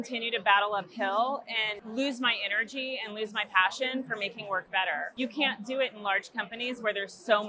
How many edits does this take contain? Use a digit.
2